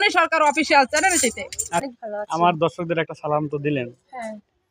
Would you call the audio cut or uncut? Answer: cut